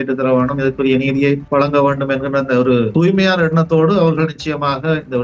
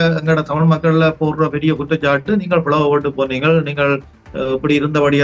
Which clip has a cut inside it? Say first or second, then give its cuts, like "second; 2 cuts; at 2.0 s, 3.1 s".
first; 2 cuts; at 1.4 s, 2.9 s